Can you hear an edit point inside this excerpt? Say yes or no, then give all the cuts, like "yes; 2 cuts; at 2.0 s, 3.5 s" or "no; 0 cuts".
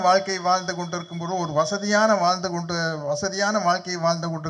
no; 0 cuts